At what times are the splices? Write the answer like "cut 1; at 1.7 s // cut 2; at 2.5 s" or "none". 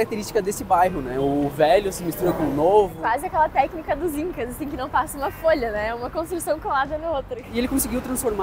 cut 1; at 3.0 s // cut 2; at 7.4 s